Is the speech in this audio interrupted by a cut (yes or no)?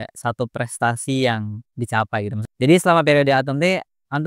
yes